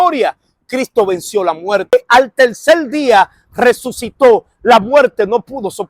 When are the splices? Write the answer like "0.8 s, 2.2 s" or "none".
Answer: 1.9 s